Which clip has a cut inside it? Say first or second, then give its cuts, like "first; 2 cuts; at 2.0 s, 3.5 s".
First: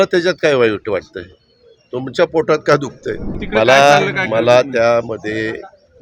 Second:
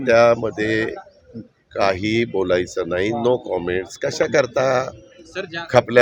first; 1 cut; at 3.3 s